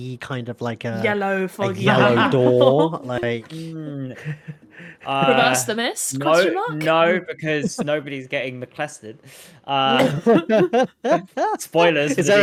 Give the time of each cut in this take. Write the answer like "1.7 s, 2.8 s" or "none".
none